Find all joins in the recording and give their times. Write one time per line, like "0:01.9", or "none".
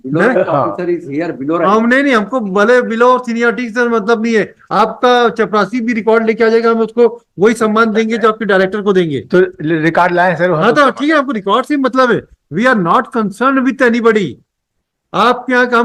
none

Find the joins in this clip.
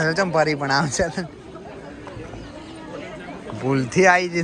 none

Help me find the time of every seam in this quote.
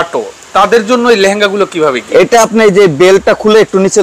none

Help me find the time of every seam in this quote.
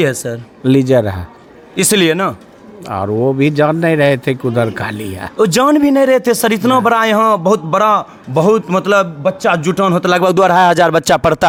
none

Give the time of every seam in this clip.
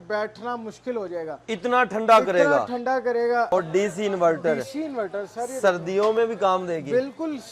0:03.5

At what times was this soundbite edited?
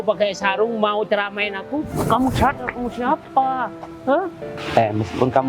0:04.6

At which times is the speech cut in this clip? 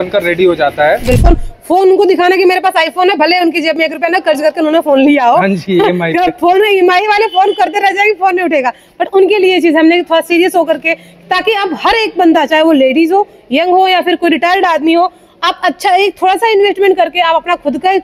0:01.2

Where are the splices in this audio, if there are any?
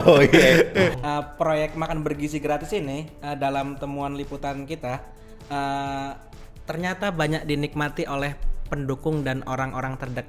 0:01.0

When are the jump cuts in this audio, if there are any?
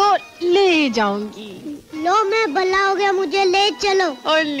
none

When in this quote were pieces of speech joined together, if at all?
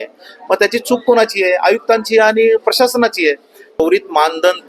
0:03.8

